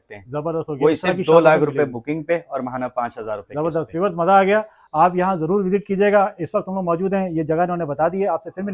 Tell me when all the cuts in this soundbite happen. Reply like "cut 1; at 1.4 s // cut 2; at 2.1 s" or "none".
none